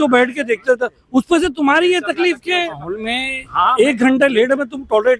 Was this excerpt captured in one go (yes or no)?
no